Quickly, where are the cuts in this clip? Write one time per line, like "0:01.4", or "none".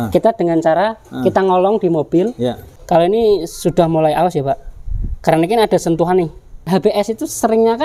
0:02.6
0:06.6